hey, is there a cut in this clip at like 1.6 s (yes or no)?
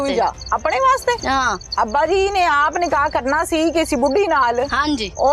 yes